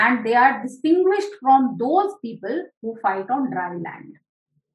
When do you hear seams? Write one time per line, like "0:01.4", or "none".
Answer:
none